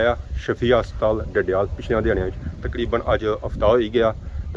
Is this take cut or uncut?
uncut